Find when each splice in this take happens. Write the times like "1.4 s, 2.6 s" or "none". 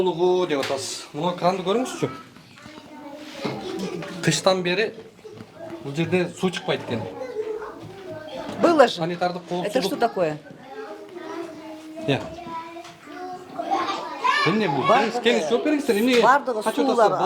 none